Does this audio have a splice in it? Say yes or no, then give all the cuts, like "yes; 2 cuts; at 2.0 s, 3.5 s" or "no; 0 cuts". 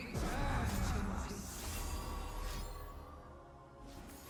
no; 0 cuts